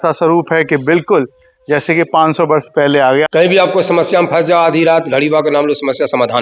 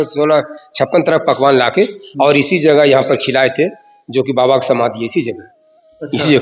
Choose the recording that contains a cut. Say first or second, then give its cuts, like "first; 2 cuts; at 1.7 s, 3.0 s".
first; 1 cut; at 3.3 s